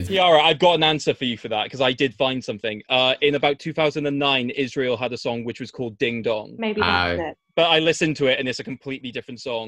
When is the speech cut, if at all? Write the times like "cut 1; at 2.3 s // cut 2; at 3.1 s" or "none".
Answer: cut 1; at 6.5 s